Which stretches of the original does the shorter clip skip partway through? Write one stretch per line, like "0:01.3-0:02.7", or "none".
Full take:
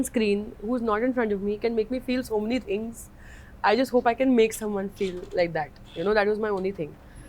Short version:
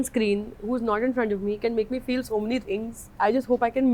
0:03.0-0:03.4

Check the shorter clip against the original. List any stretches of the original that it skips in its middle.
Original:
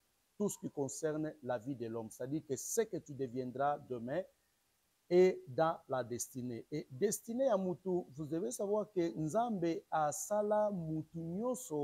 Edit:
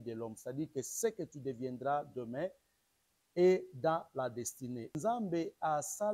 0:06.7-0:09.2

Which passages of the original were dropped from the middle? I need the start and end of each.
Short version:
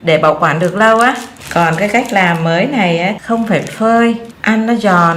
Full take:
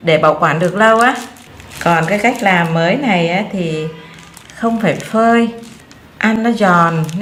0:01.3-0:01.6
0:03.5-0:04.5
0:05.6-0:06.1

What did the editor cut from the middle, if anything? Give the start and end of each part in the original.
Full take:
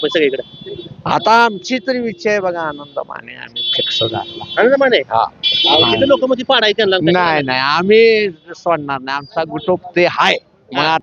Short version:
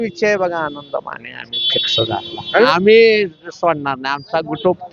0:04.7-0:07.7

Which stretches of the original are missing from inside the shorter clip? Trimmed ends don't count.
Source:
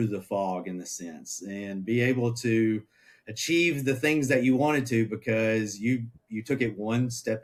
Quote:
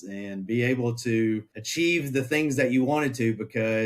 0:03.0-0:03.3

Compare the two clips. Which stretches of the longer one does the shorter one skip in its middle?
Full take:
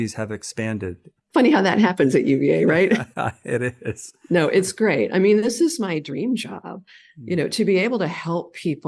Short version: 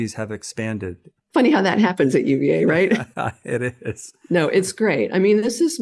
none

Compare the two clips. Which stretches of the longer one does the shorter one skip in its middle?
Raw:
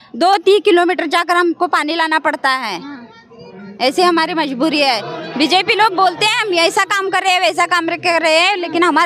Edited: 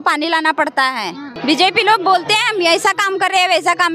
0:02.9-0:05.2

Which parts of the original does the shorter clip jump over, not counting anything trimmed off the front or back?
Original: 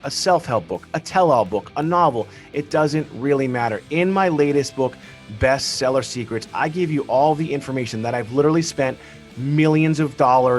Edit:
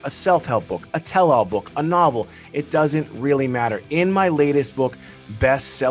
none

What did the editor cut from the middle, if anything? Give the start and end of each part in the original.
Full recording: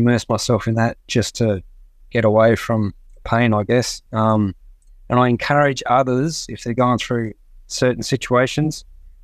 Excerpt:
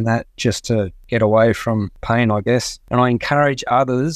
0:01.7-0:02.0
0:03.0-0:03.2
0:04.0-0:04.9

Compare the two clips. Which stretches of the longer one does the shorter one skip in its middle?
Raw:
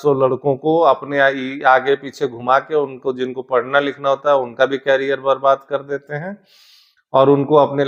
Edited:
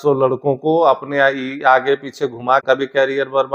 0:02.6-0:04.5

